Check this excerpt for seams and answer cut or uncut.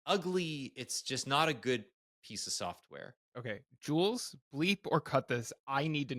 cut